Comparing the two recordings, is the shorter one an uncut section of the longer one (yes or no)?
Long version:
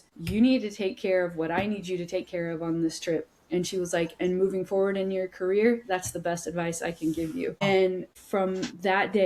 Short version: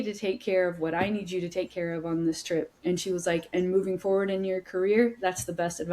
no